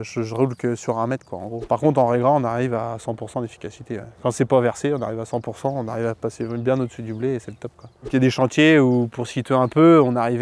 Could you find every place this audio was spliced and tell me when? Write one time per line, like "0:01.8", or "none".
0:01.6
0:08.1

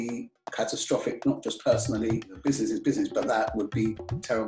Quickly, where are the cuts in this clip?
0:02.4

